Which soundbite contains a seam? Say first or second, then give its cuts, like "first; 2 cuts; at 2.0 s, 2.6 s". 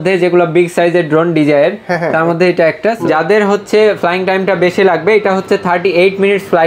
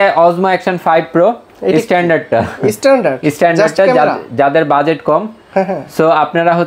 first; 1 cut; at 3.0 s